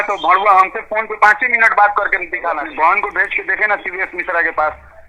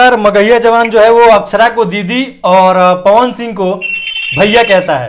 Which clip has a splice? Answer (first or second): first